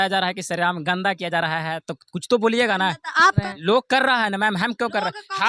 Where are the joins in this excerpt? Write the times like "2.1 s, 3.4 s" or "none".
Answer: 3.4 s